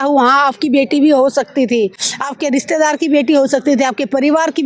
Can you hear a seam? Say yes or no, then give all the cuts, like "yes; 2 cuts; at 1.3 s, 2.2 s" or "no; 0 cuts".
no; 0 cuts